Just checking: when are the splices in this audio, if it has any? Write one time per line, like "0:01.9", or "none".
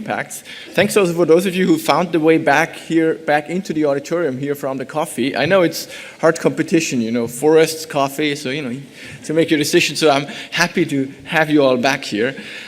0:09.3